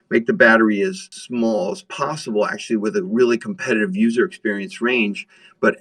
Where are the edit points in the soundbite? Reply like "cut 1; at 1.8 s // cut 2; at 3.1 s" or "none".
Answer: none